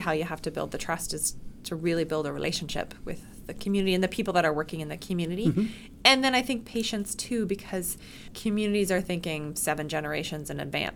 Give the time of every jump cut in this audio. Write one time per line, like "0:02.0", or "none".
0:08.3